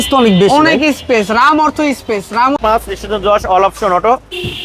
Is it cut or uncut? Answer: cut